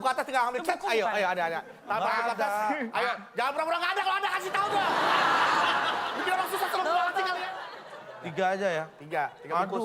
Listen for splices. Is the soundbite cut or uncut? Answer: cut